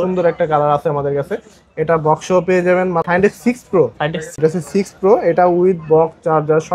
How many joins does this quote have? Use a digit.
2